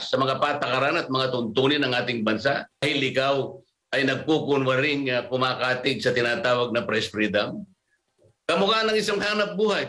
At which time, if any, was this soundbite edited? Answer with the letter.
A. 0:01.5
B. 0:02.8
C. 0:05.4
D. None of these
B